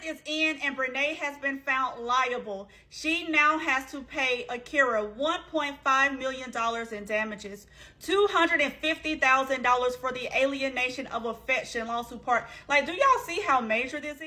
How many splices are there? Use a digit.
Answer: 0